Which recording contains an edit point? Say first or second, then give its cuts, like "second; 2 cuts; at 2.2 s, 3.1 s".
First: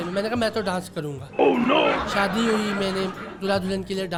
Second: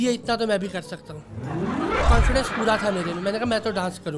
second; 1 cut; at 2.1 s